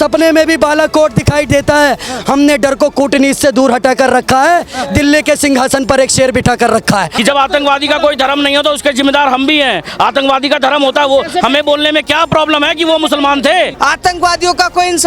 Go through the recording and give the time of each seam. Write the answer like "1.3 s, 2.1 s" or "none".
7.1 s, 13.7 s